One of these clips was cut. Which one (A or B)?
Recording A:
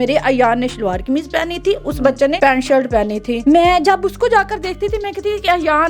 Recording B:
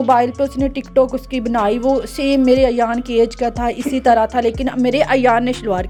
A